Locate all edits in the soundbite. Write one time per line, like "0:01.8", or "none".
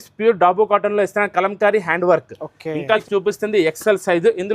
0:03.0